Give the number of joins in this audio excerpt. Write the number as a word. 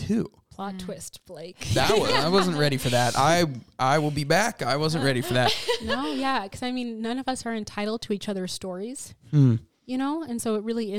zero